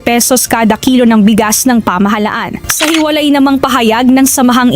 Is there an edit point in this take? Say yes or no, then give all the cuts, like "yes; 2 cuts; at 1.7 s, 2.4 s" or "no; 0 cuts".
yes; 1 cut; at 2.6 s